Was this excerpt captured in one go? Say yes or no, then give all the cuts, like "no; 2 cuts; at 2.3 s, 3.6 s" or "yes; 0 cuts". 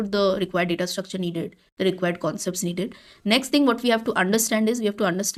yes; 0 cuts